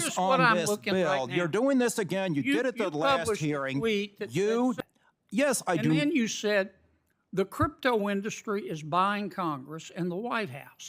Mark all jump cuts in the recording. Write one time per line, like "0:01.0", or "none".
0:04.8